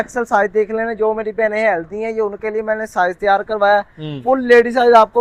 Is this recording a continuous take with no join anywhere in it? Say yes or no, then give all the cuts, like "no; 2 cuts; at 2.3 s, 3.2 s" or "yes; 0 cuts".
yes; 0 cuts